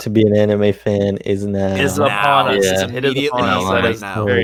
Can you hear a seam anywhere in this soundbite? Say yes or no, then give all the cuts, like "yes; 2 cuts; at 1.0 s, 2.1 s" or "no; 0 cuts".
no; 0 cuts